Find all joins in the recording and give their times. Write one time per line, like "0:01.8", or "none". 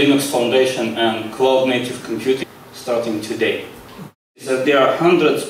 0:02.4
0:04.4